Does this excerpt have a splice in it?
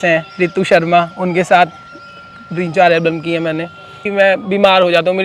yes; 1 cut; at 4.0 s

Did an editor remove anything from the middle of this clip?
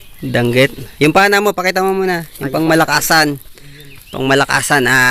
no; 0 cuts

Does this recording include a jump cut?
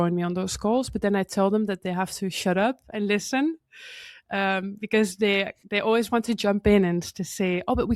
no; 0 cuts

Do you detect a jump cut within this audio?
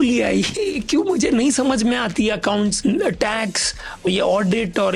yes; 2 cuts; at 2.8 s, 4.1 s

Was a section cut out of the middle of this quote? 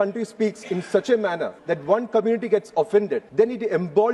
yes; 2 cuts; at 1.5 s, 3.3 s

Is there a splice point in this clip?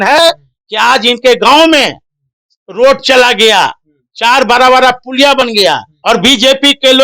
yes; 1 cut; at 5.9 s

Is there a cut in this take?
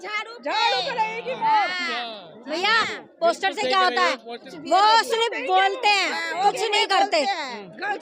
yes; 1 cut; at 4.4 s

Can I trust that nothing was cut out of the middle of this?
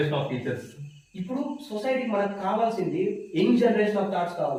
yes; 0 cuts

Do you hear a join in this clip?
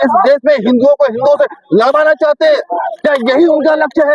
no; 0 cuts

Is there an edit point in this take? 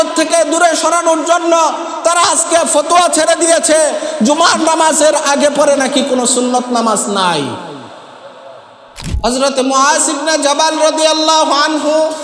yes; 1 cut; at 9.1 s

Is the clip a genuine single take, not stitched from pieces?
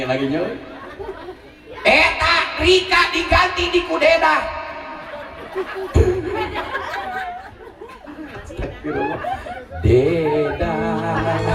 yes; 0 cuts

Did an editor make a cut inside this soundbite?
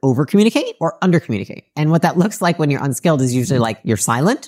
no; 0 cuts

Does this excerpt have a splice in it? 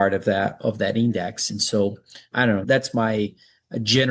yes; 1 cut; at 2.5 s

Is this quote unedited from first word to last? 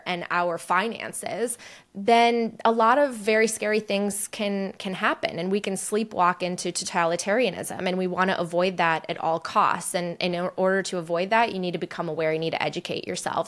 yes; 0 cuts

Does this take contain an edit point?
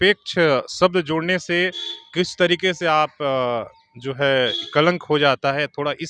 no; 0 cuts

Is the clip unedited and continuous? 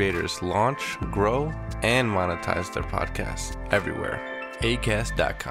yes; 0 cuts

